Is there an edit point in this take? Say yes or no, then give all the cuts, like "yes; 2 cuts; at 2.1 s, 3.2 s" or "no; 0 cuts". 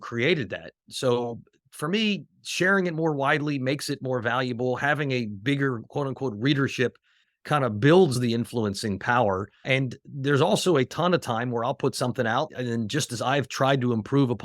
yes; 5 cuts; at 0.9 s, 7.3 s, 8.2 s, 9.6 s, 12.5 s